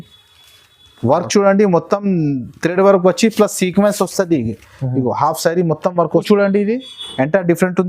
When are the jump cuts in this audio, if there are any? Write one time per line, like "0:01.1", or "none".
0:06.2